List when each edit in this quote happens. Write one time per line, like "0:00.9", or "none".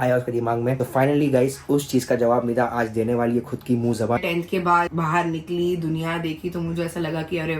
0:04.2